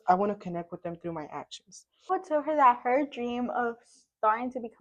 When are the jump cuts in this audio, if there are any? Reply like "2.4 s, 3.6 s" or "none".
2.1 s